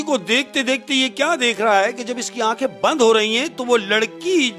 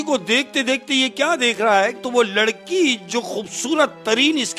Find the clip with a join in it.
second; 1 cut; at 2.0 s

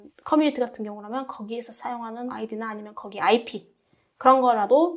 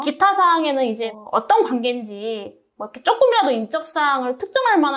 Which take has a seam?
first; 1 cut; at 2.3 s

